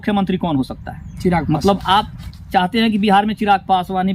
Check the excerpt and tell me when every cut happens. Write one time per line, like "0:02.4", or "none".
0:01.4